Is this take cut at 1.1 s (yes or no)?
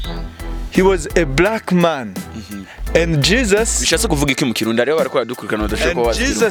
no